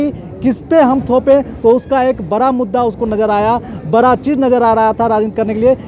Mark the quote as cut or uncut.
uncut